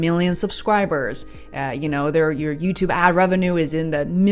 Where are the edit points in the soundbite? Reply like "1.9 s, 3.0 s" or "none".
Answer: none